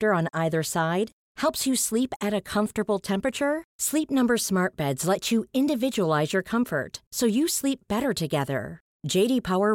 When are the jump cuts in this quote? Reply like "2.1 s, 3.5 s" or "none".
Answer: none